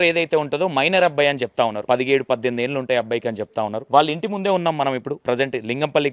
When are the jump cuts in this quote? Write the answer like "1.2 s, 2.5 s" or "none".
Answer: 1.8 s, 3.8 s, 5.1 s